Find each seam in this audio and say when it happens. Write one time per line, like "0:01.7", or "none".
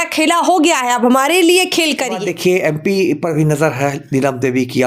0:02.2